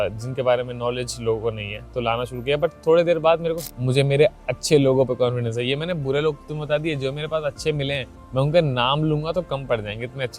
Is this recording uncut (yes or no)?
no